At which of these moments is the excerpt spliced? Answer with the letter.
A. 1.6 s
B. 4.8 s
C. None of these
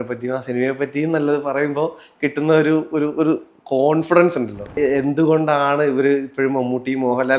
B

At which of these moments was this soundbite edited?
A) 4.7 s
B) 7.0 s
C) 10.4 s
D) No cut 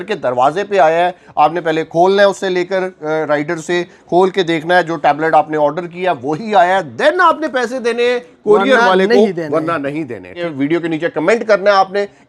C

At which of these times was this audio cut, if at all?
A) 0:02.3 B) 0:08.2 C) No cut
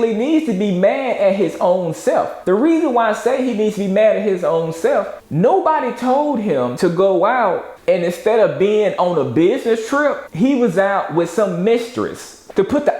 A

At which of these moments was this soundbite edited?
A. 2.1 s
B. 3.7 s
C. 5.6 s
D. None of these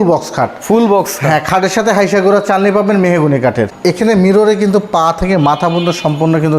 B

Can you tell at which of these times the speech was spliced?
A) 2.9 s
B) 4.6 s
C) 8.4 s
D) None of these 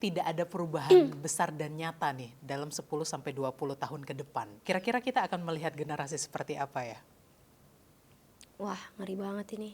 B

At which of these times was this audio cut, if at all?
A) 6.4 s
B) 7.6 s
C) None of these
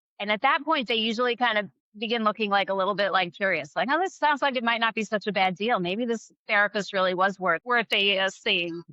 B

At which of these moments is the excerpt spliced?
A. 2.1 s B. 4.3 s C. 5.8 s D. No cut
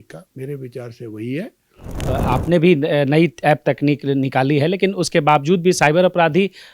A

